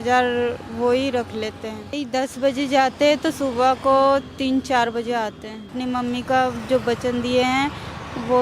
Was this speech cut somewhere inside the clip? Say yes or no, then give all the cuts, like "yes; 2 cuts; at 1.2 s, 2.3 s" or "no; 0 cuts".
yes; 2 cuts; at 2.0 s, 5.8 s